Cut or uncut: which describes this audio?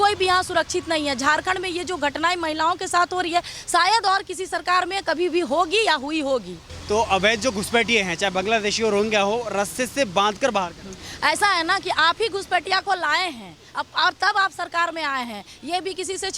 uncut